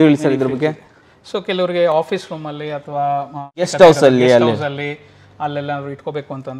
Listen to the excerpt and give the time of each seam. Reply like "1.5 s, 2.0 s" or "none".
3.7 s